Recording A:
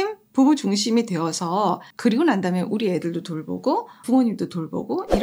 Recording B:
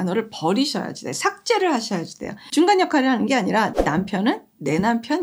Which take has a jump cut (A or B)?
A